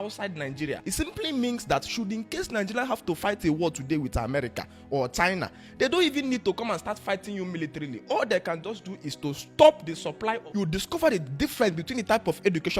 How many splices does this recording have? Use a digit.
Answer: 2